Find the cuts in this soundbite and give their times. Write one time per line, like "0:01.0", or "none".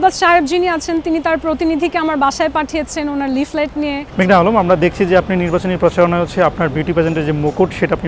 0:04.0